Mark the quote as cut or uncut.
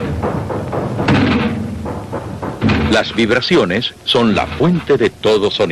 uncut